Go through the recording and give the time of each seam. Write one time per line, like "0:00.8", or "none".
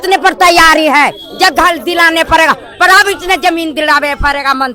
none